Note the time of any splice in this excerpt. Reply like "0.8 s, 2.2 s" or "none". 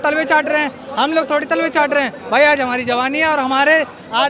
none